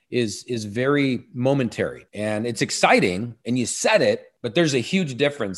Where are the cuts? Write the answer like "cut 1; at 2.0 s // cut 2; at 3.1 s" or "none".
cut 1; at 2.1 s // cut 2; at 4.3 s